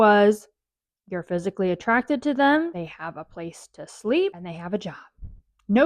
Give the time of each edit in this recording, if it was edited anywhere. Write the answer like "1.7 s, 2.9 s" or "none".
2.7 s, 4.4 s